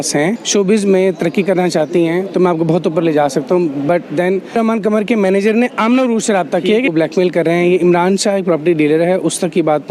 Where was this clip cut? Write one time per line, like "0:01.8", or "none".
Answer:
none